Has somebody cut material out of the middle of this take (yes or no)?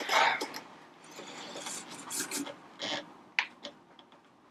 no